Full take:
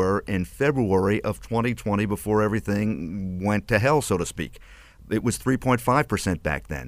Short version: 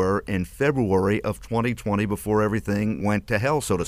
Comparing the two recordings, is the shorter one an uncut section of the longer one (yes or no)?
no